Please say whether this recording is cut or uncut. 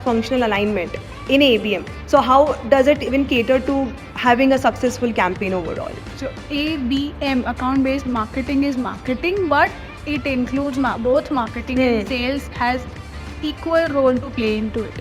uncut